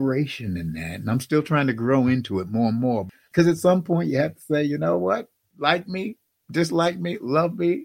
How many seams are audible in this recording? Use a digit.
2